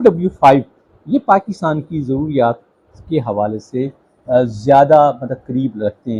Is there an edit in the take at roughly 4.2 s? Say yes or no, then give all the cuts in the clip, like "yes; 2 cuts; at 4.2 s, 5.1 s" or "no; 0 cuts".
no; 0 cuts